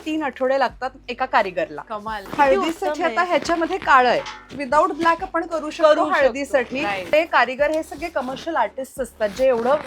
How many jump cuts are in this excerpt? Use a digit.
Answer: 2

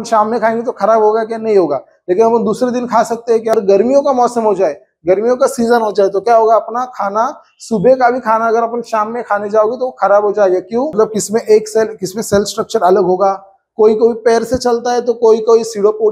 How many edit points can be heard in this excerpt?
2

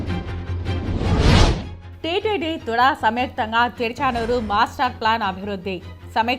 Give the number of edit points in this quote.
1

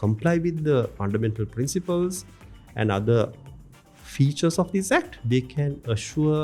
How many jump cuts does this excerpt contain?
2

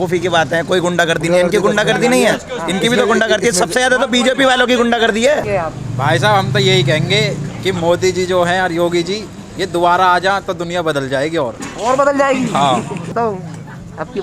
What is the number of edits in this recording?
2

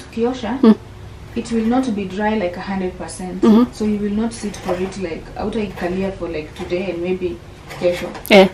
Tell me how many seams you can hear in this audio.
0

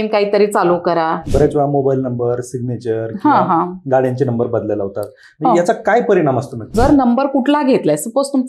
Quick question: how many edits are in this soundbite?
2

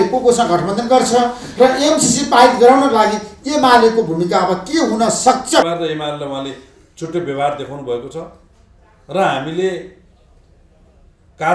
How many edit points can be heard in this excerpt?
1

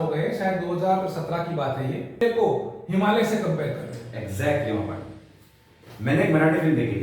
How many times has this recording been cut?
1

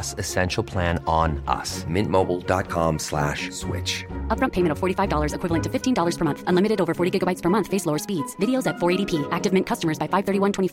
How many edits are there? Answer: 0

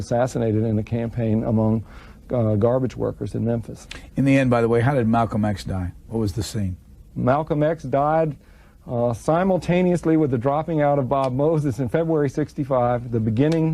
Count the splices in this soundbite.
0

